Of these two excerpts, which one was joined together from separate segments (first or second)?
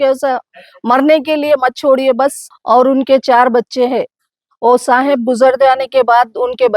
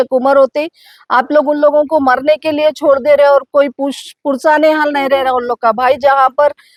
first